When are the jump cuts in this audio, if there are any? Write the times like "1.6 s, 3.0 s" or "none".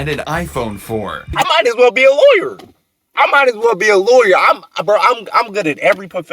1.3 s

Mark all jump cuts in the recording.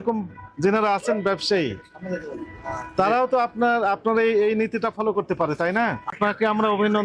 6.1 s

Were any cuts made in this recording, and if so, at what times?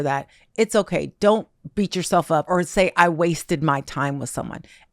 2.5 s

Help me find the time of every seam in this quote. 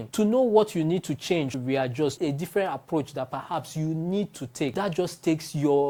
none

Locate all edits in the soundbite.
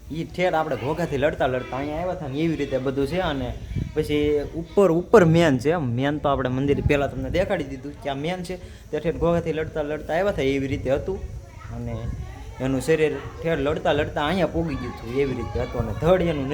none

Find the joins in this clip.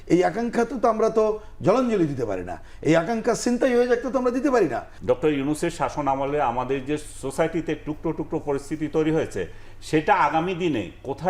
4.9 s

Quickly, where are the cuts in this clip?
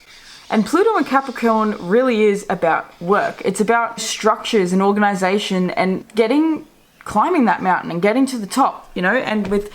4.1 s, 6.0 s

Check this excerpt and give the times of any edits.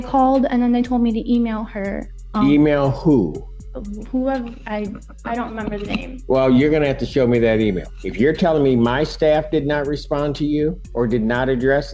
7.9 s, 10.8 s

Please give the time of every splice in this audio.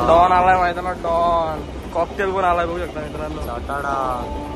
none

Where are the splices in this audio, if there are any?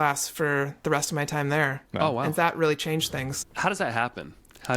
1.8 s, 3.3 s

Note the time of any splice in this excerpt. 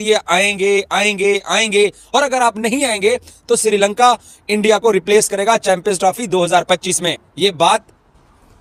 none

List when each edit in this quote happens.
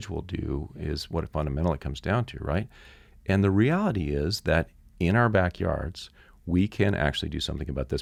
none

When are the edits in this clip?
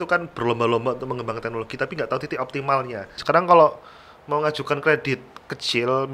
3.1 s

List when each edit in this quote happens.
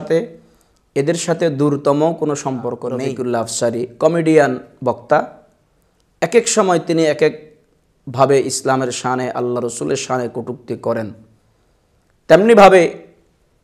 3.0 s

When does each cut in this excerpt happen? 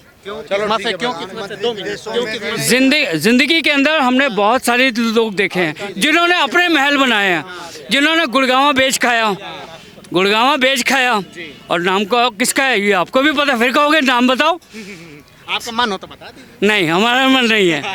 none

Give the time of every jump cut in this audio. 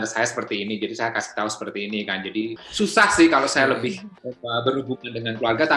2.5 s

